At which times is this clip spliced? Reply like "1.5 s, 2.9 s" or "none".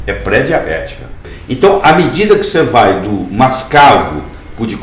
1.3 s